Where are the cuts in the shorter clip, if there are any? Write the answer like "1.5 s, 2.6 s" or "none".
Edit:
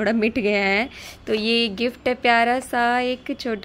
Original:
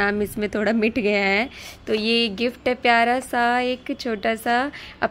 none